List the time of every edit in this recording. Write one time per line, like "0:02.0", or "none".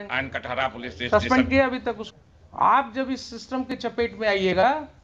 0:02.1